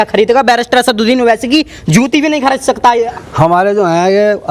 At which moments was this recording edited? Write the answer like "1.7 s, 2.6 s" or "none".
3.0 s